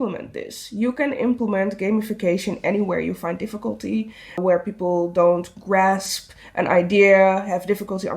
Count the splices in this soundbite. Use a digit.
1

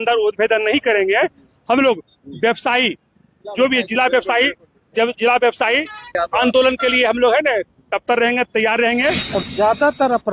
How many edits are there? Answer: 2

